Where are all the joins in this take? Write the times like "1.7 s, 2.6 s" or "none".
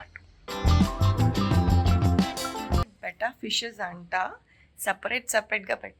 2.8 s